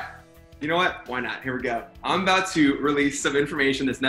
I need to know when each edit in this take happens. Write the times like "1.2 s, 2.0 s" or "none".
none